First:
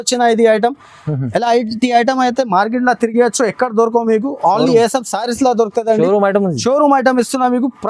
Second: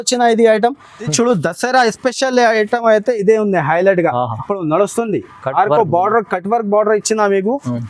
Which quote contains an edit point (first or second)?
second